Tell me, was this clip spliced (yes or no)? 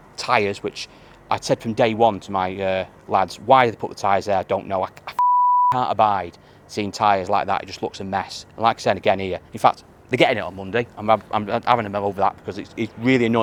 no